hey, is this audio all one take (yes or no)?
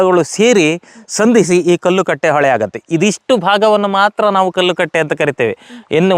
yes